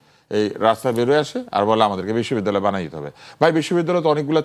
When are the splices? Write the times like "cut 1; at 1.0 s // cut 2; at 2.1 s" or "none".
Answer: none